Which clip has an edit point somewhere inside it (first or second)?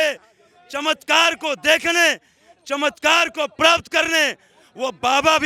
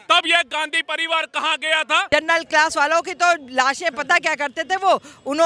second